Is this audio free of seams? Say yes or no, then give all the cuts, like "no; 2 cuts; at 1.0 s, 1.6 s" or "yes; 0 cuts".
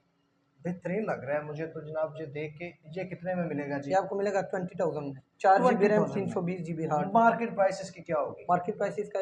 yes; 0 cuts